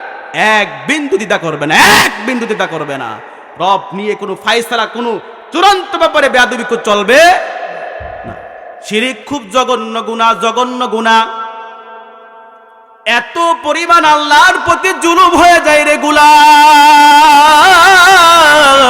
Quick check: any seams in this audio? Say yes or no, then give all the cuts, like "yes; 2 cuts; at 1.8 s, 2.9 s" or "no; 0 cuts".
yes; 1 cut; at 8.7 s